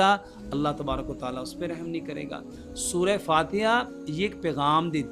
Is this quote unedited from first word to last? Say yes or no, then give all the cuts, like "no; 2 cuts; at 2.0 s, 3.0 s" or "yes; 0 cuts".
yes; 0 cuts